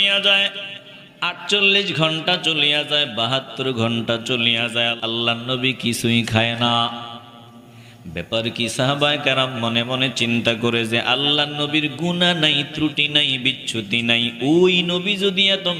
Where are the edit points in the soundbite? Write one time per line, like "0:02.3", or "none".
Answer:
0:05.0